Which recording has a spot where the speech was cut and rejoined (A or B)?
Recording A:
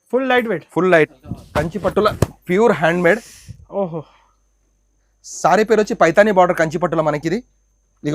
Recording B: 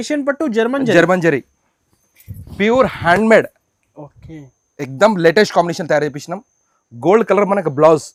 A